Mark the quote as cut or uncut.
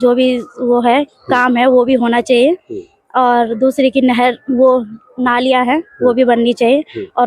uncut